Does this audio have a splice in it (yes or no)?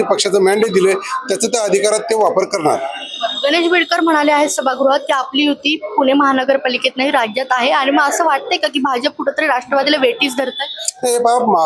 no